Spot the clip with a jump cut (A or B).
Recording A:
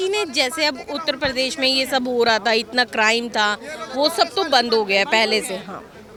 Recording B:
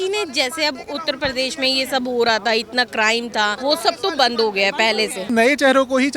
B